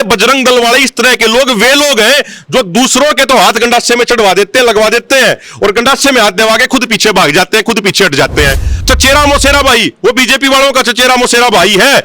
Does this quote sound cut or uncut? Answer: cut